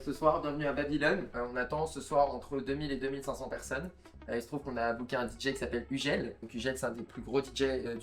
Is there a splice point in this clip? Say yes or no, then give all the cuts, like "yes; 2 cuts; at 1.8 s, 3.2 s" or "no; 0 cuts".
yes; 2 cuts; at 1.3 s, 6.5 s